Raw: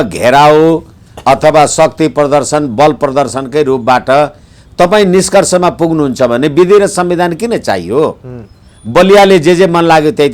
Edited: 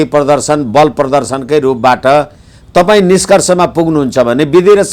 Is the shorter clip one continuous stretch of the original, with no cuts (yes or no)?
yes